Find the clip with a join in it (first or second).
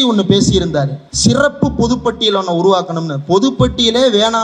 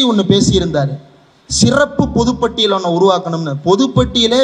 first